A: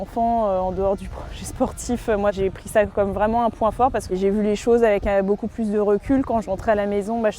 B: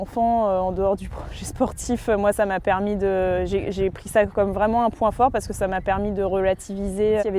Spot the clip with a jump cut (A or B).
A